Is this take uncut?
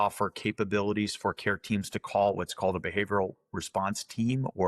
yes; 0 cuts

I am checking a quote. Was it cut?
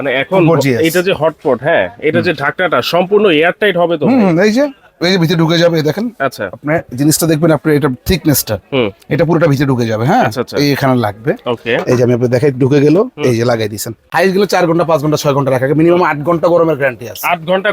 yes; 1 cut; at 14.0 s

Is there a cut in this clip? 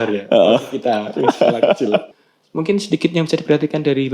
yes; 1 cut; at 2.1 s

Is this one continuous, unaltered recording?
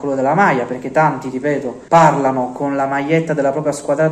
no; 1 cut; at 1.7 s

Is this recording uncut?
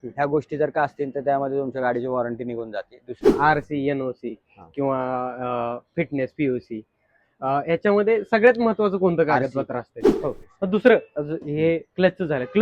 no; 2 cuts; at 3.3 s, 10.0 s

